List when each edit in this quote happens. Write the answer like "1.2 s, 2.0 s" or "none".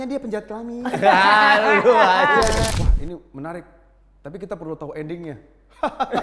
2.7 s